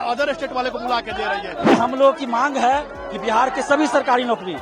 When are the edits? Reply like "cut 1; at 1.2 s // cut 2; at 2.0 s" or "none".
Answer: cut 1; at 1.6 s